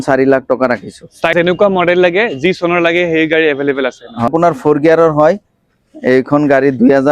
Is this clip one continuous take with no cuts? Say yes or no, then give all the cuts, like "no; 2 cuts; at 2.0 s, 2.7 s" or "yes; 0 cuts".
no; 2 cuts; at 1.3 s, 4.3 s